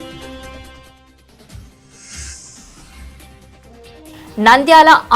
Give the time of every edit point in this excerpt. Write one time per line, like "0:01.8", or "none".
0:03.2